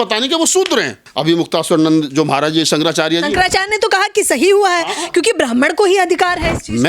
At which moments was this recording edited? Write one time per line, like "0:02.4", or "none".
0:01.0